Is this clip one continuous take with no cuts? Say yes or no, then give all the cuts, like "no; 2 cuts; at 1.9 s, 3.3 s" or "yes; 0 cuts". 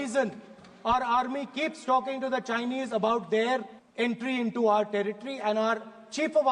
no; 1 cut; at 3.8 s